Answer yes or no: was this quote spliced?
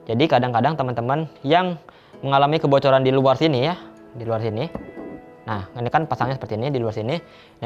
no